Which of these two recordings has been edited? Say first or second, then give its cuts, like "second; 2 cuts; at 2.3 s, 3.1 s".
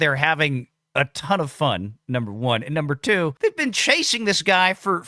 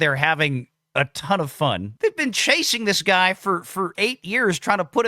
second; 1 cut; at 1.9 s